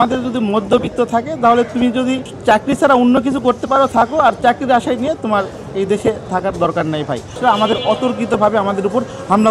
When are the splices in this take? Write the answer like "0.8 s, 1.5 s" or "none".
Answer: 7.3 s